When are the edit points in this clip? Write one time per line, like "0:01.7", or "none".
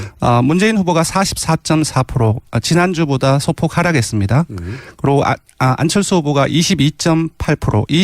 0:03.3